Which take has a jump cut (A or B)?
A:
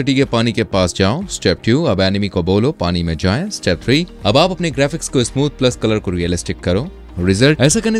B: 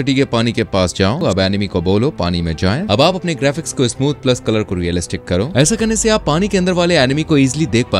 B